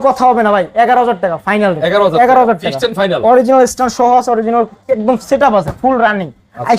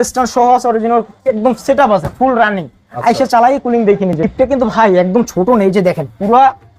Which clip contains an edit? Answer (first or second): second